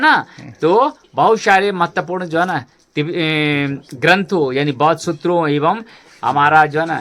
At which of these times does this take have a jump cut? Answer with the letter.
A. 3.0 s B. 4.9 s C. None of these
C